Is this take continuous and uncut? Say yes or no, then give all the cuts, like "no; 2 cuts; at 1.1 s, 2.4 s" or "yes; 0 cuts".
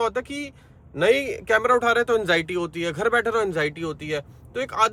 yes; 0 cuts